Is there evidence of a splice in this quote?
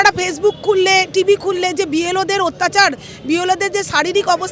no; 0 cuts

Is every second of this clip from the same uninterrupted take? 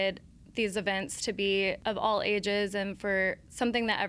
no; 1 cut; at 1.8 s

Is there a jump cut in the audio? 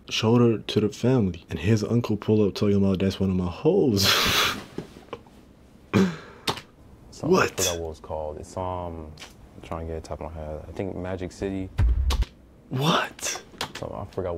no; 0 cuts

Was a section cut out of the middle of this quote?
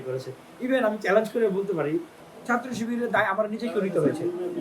yes; 1 cut; at 2.2 s

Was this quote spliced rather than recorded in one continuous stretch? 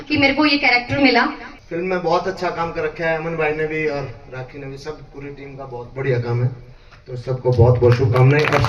yes; 1 cut; at 1.4 s

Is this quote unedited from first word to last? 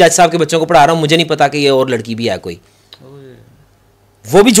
yes; 0 cuts

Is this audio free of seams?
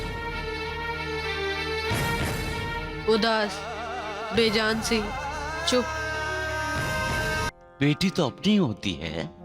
no; 1 cut; at 7.5 s

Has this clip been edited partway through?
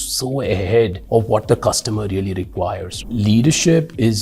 yes; 2 cuts; at 1.0 s, 3.0 s

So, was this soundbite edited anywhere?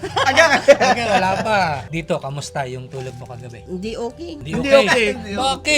yes; 3 cuts; at 1.9 s, 3.5 s, 4.4 s

